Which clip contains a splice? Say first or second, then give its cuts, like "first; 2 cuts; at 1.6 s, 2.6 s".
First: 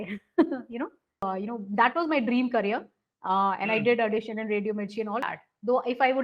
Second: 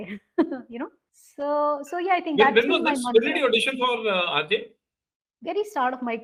first; 2 cuts; at 1.2 s, 5.2 s